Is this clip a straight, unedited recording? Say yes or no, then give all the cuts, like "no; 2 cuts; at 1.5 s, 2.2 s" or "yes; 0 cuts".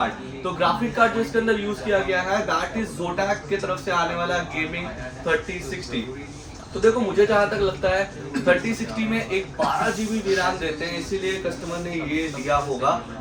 yes; 0 cuts